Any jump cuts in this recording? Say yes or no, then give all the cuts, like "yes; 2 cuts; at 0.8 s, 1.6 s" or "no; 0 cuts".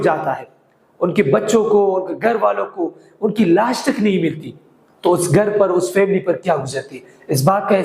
no; 0 cuts